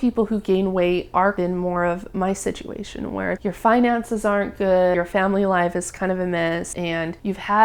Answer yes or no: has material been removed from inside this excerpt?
yes